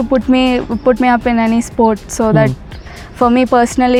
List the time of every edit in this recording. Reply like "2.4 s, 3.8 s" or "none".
none